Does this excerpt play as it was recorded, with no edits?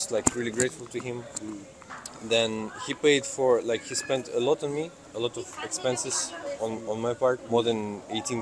no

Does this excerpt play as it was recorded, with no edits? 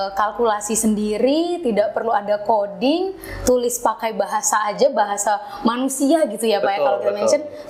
yes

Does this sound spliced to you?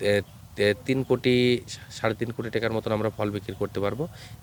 no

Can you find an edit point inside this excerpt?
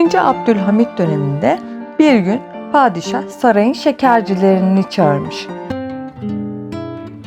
yes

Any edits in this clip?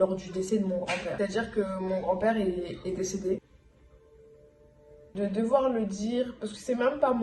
yes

